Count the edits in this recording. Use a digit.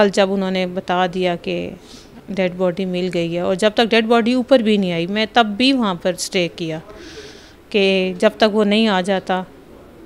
0